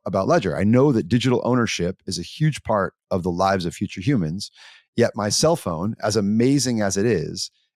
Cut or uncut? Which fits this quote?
uncut